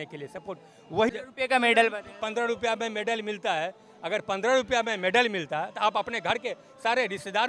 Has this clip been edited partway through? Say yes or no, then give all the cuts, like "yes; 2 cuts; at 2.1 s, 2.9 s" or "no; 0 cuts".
yes; 1 cut; at 1.1 s